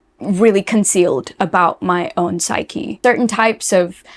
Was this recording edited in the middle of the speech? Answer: yes; 1 cut; at 3.0 s

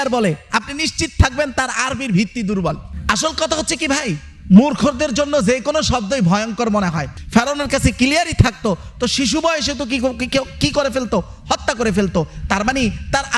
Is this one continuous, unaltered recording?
no; 2 cuts; at 2.9 s, 7.2 s

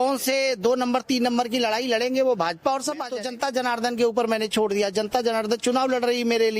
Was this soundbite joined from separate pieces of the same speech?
yes; 1 cut; at 3.1 s

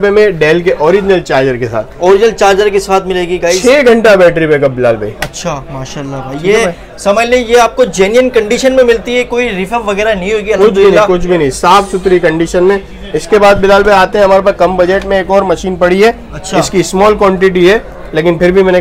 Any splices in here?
no; 0 cuts

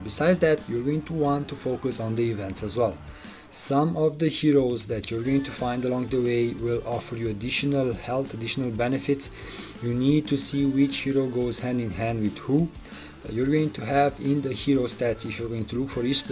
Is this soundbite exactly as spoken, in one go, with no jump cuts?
yes; 0 cuts

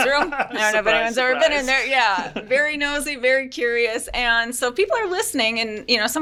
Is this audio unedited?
yes; 0 cuts

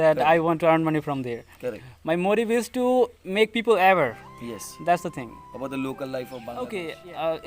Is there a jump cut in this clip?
yes; 1 cut; at 6.4 s

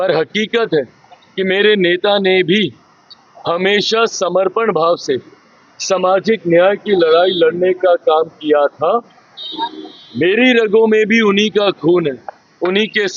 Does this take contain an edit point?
no; 0 cuts

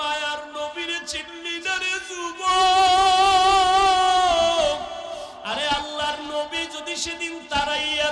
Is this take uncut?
no; 1 cut; at 5.4 s

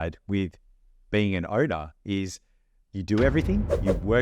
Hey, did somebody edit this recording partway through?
no; 0 cuts

